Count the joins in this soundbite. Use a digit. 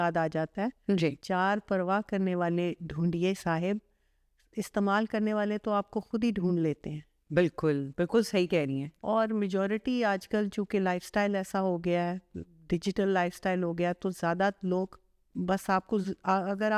0